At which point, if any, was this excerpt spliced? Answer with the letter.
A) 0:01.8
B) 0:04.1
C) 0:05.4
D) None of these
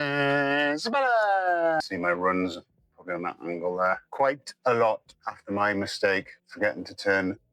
A